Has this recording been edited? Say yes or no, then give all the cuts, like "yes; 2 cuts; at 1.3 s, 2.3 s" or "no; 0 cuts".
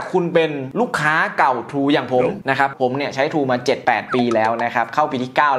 yes; 1 cut; at 2.7 s